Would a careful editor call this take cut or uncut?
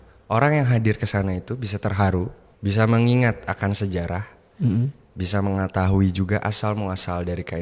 cut